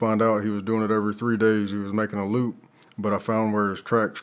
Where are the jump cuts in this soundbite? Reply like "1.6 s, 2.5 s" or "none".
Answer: none